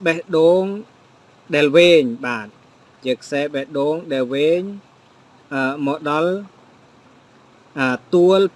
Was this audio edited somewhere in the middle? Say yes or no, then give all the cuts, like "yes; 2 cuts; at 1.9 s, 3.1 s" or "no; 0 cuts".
no; 0 cuts